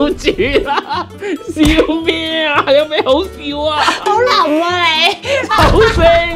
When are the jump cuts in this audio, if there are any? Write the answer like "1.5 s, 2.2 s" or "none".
none